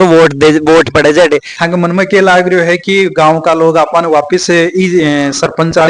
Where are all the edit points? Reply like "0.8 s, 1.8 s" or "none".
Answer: 1.5 s